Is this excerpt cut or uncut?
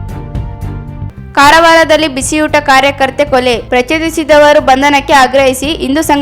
cut